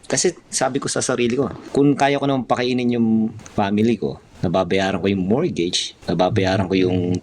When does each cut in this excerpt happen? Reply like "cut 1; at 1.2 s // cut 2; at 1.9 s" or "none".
cut 1; at 1.6 s // cut 2; at 3.4 s // cut 3; at 4.3 s // cut 4; at 5.9 s